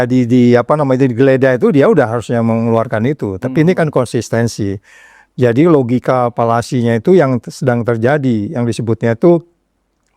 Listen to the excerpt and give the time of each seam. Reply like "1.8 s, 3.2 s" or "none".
none